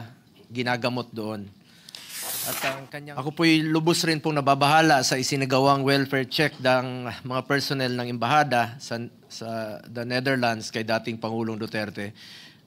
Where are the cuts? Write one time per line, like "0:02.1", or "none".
0:03.0